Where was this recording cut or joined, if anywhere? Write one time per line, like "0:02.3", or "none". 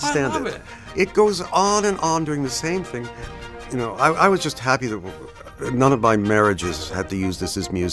0:03.2